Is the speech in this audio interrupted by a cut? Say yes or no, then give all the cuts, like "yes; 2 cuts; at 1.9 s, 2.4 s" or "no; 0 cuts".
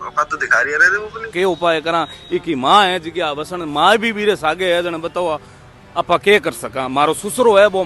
yes; 1 cut; at 1.3 s